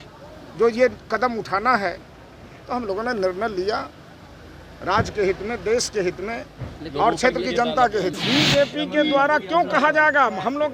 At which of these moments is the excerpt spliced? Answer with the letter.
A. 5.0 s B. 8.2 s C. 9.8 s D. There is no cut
B